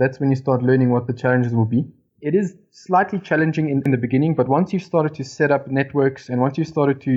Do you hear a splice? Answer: yes; 2 cuts; at 1.1 s, 2.1 s

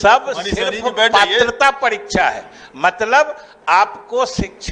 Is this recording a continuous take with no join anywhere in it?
yes; 0 cuts

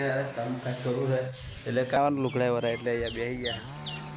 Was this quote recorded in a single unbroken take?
no; 1 cut; at 2.0 s

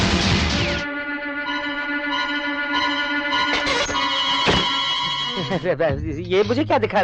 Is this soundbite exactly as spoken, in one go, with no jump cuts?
no; 1 cut; at 5.3 s

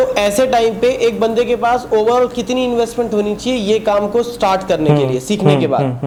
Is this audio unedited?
yes; 0 cuts

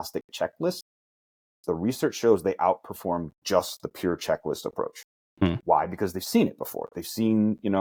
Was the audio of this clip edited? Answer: no; 0 cuts

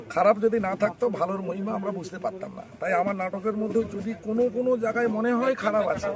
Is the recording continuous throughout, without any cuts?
yes; 0 cuts

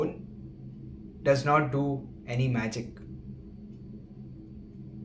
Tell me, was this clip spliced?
no; 0 cuts

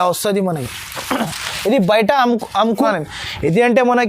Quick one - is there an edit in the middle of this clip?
yes; 1 cut; at 2.8 s

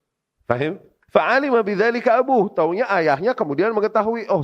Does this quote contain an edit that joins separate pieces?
yes; 1 cut; at 0.9 s

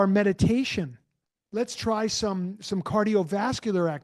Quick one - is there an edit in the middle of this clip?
no; 0 cuts

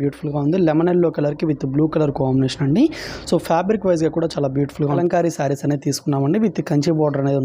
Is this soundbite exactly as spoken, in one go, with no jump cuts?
no; 1 cut; at 4.9 s

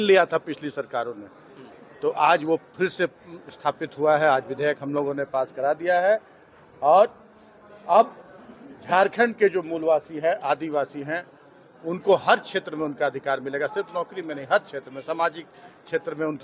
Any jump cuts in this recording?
no; 0 cuts

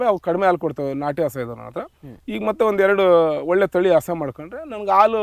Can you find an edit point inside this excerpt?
no; 0 cuts

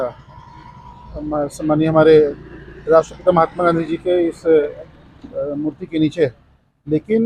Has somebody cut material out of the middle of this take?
no; 0 cuts

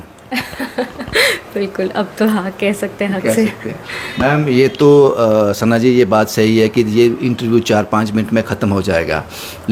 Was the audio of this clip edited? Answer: no; 0 cuts

